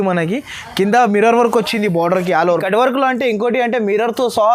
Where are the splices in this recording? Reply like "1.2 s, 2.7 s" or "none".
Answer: 2.6 s